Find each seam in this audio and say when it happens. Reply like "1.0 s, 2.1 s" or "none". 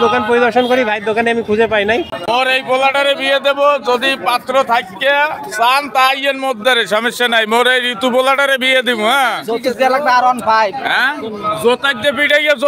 2.1 s